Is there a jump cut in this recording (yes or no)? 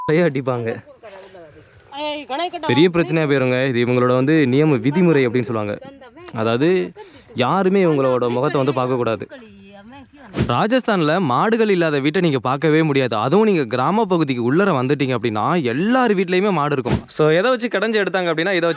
yes